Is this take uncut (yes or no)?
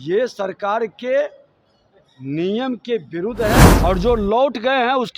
no